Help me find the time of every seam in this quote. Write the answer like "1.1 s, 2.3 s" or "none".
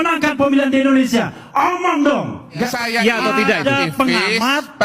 2.7 s